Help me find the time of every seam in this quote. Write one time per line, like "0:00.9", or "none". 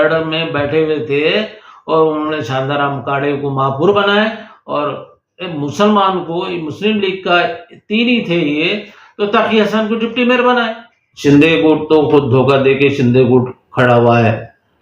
0:11.1